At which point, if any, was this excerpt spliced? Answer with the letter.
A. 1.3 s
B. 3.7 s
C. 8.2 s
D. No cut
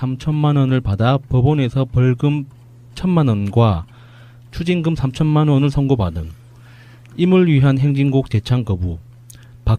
B